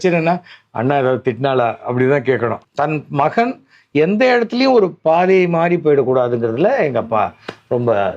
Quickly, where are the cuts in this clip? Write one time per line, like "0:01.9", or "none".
0:02.6